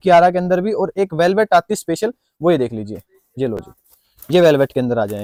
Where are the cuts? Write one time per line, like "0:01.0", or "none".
none